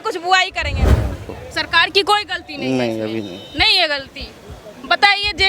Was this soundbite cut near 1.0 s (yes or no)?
yes